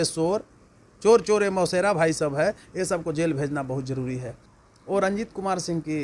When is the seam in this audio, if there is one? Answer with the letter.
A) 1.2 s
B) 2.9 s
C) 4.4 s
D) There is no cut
C